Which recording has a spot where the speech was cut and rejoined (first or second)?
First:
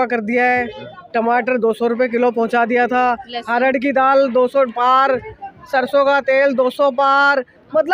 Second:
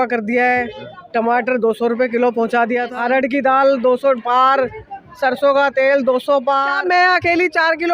second